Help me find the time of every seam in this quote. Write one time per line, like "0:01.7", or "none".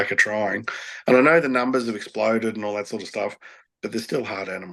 none